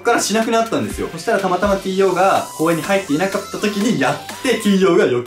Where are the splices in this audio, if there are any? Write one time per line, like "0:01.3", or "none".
0:01.1